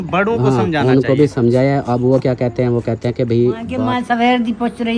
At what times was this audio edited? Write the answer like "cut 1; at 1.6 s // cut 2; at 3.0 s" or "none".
cut 1; at 3.8 s